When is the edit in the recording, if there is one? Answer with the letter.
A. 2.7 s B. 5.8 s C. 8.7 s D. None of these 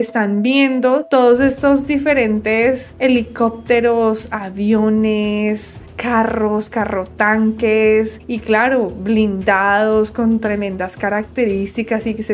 D